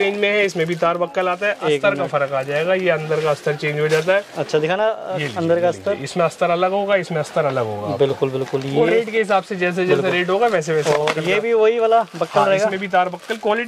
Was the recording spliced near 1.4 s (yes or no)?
no